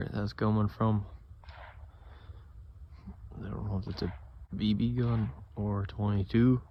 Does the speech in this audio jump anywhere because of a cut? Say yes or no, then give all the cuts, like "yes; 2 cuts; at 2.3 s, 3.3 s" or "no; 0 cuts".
no; 0 cuts